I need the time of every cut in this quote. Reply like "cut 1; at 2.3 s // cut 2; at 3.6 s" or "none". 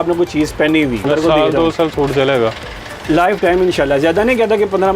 cut 1; at 1.0 s